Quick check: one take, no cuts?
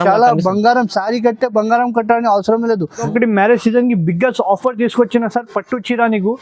no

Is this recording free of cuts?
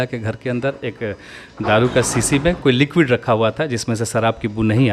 yes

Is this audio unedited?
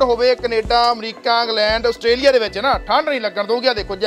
yes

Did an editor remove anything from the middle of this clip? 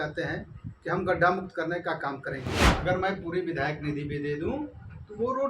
yes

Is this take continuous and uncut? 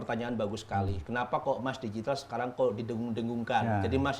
yes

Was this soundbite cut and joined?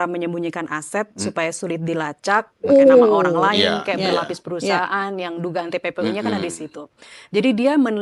no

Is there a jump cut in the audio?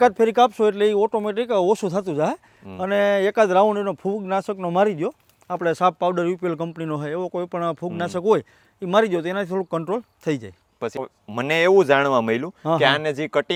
no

